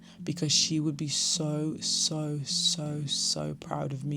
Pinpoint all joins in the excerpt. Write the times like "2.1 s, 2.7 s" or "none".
none